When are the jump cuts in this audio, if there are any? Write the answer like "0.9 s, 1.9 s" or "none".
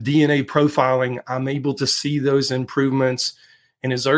none